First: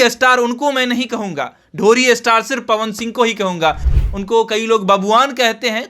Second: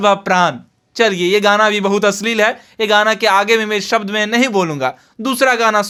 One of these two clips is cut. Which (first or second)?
first